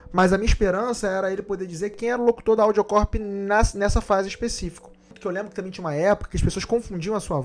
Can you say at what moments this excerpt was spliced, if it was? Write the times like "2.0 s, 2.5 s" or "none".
2.0 s, 5.1 s